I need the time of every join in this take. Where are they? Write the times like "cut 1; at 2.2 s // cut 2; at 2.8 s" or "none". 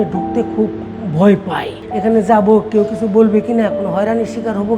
cut 1; at 1.8 s